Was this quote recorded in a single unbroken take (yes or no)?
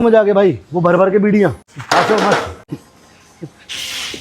no